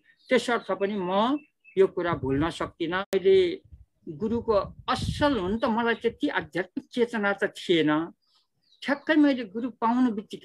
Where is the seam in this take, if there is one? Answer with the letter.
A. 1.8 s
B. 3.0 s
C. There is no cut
B